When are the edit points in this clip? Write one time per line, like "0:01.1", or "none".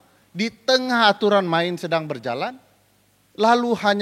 none